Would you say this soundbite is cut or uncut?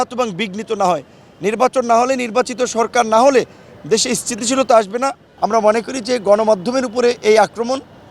cut